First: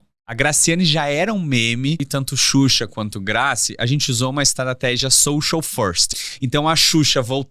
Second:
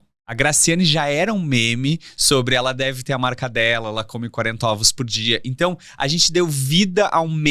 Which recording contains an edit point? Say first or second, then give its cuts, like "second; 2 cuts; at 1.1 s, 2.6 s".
first; 2 cuts; at 2.0 s, 6.1 s